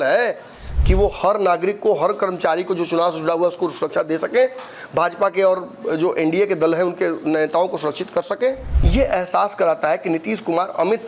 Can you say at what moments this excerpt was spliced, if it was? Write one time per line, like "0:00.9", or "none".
0:08.7